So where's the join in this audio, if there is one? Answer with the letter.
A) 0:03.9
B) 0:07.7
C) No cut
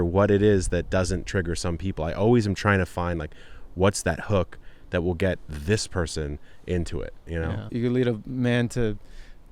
B